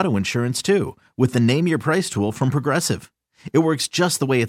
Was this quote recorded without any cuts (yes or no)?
yes